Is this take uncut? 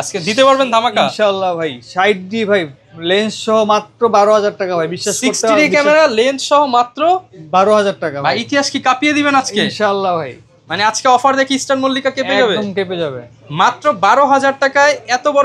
yes; 0 cuts

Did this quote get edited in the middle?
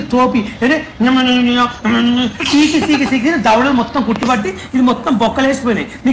no; 0 cuts

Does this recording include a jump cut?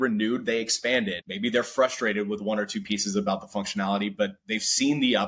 yes; 1 cut; at 1.2 s

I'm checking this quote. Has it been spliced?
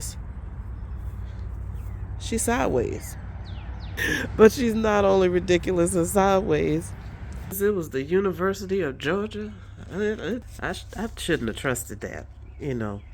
yes; 3 cuts; at 3.9 s, 7.6 s, 10.5 s

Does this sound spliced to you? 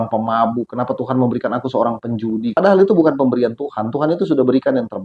yes; 1 cut; at 2.6 s

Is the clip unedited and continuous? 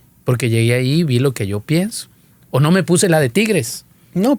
yes; 0 cuts

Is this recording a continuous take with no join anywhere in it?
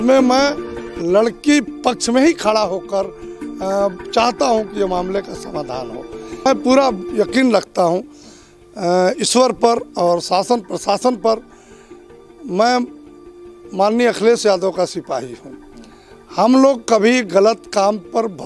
no; 1 cut; at 6.5 s

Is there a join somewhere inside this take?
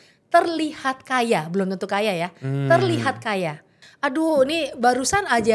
yes; 1 cut; at 3.8 s

